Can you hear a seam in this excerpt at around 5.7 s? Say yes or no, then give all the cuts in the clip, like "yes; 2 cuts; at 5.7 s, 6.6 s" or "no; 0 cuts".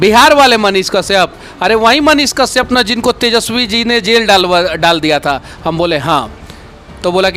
no; 0 cuts